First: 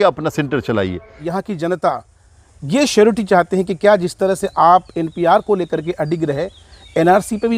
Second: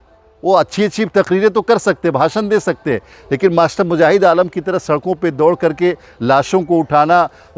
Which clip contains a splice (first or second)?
first